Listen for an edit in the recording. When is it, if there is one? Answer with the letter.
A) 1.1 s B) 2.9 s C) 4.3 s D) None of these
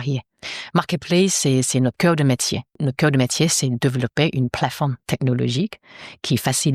B